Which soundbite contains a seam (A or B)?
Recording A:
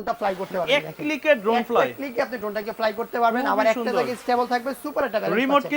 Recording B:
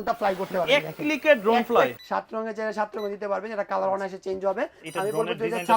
B